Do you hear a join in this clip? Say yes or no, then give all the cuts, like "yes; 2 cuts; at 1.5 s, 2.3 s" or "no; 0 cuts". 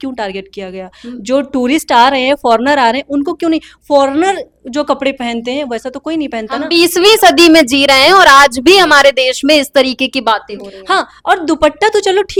no; 0 cuts